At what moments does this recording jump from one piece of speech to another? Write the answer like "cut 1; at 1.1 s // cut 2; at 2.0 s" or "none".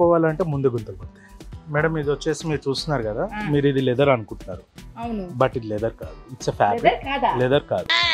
cut 1; at 1.0 s